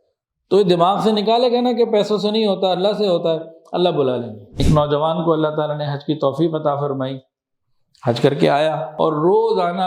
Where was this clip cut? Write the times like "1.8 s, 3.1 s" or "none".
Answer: 4.5 s, 8.9 s